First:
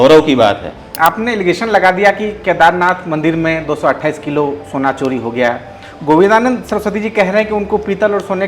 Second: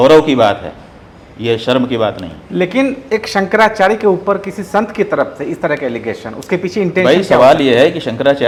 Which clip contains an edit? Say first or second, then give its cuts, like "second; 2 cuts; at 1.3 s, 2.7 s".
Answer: first; 1 cut; at 0.9 s